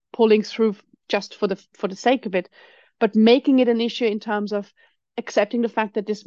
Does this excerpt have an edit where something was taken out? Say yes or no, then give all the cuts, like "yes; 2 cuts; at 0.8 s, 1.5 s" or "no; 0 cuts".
no; 0 cuts